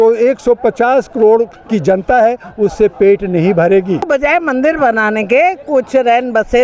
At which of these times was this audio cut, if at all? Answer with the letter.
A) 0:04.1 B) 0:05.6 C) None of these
A